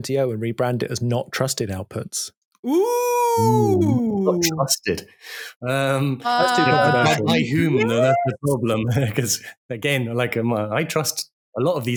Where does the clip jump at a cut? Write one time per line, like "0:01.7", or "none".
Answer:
none